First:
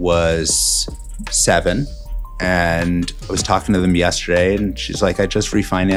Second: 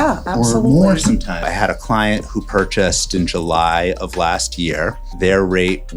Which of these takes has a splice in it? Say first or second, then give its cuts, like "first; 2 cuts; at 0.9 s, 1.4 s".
second; 3 cuts; at 1.4 s, 3.1 s, 5.0 s